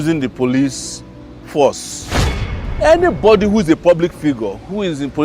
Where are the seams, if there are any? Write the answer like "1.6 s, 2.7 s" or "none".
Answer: 2.4 s